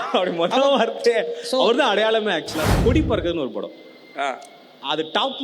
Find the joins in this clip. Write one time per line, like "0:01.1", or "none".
0:02.7